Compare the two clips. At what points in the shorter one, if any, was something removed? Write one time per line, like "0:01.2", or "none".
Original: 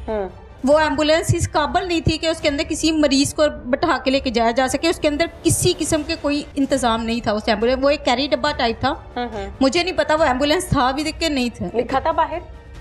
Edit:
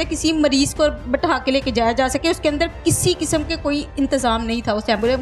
none